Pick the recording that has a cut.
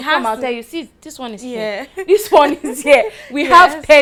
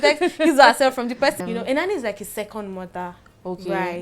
second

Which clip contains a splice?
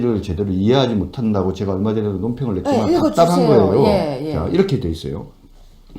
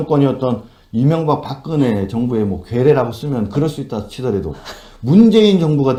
first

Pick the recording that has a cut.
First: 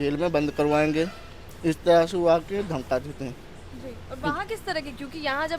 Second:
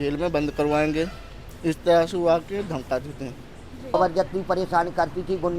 second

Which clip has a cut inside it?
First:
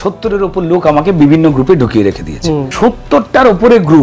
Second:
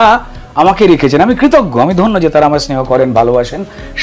first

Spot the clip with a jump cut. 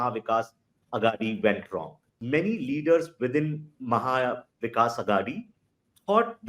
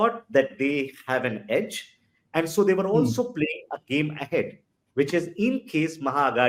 first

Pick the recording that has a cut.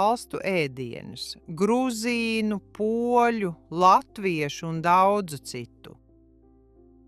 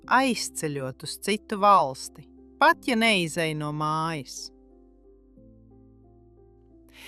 first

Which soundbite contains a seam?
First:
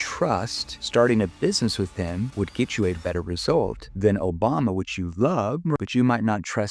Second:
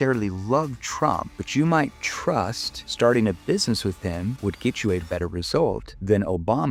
first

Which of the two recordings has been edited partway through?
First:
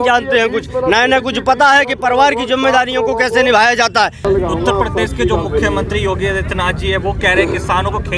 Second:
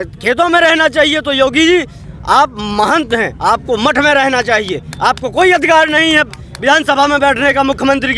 first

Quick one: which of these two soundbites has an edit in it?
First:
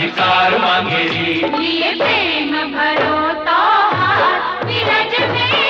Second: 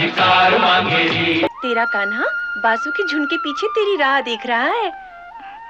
second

